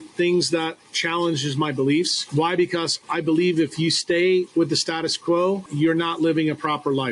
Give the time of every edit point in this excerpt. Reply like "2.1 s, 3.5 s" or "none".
2.2 s, 3.0 s, 5.7 s